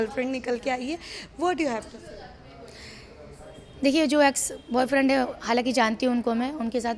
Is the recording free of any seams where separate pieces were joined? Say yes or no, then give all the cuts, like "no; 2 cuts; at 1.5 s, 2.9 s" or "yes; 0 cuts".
yes; 0 cuts